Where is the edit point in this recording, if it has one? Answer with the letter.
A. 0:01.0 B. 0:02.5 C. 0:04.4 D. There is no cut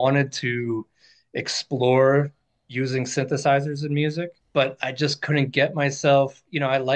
C